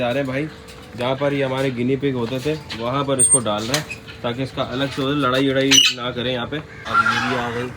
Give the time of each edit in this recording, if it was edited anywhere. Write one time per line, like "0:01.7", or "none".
0:06.9